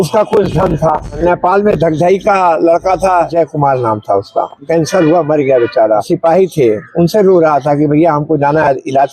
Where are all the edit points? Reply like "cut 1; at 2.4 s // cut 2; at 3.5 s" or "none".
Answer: cut 1; at 1.2 s // cut 2; at 3.3 s // cut 3; at 4.6 s // cut 4; at 6.1 s